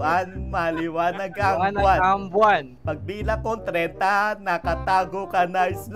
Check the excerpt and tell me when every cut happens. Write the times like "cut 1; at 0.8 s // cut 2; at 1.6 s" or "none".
none